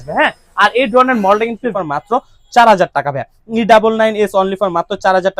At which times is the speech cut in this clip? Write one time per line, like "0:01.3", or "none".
0:01.7